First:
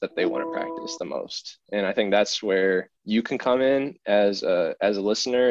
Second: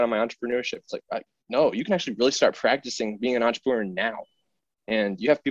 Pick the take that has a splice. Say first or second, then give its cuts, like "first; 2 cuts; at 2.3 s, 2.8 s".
first; 1 cut; at 3.0 s